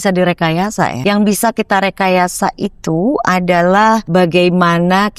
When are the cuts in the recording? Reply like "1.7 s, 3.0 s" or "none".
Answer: 1.0 s, 4.0 s